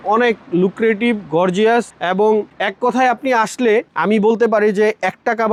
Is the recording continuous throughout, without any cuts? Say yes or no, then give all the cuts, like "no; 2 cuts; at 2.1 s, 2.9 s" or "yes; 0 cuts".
yes; 0 cuts